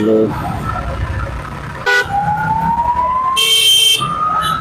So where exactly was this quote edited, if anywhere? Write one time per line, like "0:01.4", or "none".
0:01.9